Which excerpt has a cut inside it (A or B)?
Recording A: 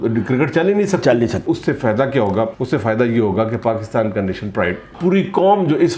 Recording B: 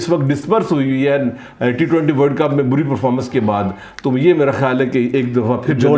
A